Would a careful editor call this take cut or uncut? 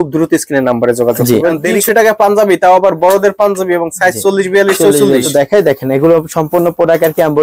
cut